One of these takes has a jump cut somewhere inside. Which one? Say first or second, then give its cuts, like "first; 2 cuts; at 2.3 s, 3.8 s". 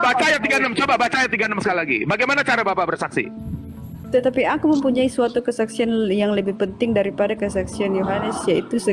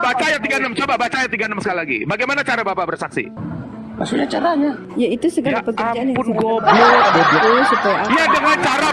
second; 1 cut; at 3.4 s